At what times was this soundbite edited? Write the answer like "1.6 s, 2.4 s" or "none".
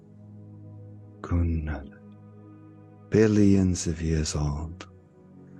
none